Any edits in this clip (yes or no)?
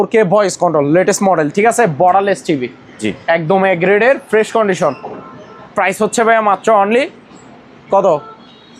no